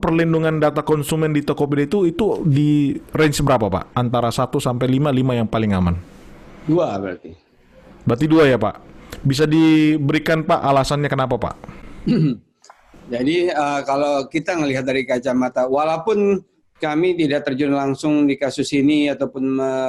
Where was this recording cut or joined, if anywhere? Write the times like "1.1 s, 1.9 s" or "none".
none